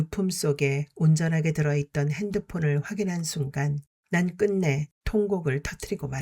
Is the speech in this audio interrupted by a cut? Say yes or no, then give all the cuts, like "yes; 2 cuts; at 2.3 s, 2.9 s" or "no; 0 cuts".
yes; 1 cut; at 3.9 s